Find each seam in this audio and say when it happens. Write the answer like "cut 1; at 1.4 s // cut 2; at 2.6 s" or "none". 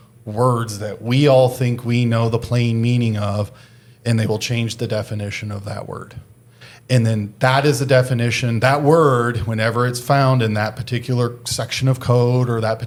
none